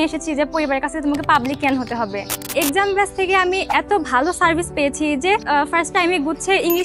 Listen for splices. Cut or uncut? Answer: cut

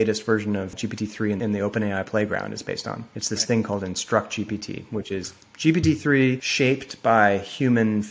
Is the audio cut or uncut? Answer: cut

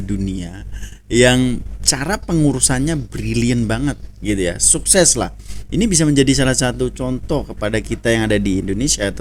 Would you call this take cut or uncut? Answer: uncut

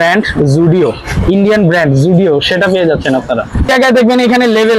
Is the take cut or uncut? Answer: cut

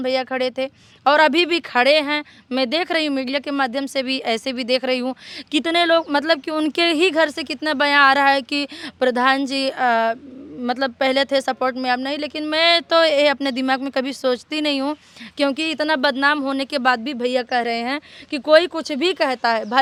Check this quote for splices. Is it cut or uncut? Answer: uncut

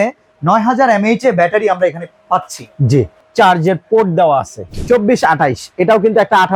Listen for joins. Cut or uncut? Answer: cut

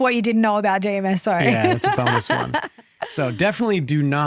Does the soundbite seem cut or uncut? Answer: uncut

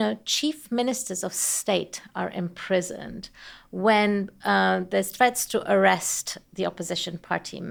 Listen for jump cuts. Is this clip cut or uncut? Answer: uncut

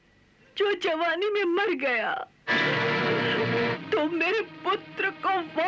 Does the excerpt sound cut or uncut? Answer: cut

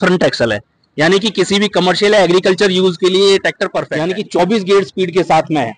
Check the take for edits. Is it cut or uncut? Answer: cut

